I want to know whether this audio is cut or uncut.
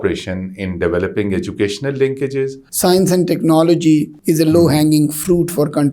cut